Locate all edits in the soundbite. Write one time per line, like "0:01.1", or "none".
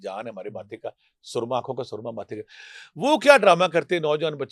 none